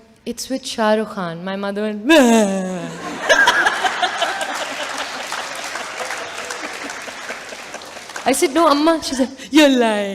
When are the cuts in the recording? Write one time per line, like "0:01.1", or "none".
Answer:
none